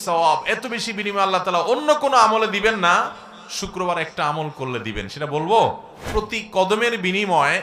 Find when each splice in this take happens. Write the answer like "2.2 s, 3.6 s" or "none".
5.9 s